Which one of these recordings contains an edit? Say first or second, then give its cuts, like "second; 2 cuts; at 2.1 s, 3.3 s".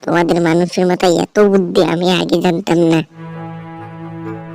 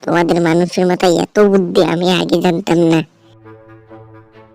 first; 1 cut; at 3.2 s